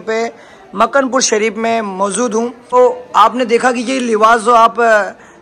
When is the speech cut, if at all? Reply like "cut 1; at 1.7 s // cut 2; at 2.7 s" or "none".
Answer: cut 1; at 2.8 s

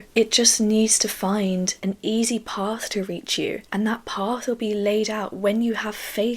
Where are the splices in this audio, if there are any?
cut 1; at 1.7 s // cut 2; at 3.6 s

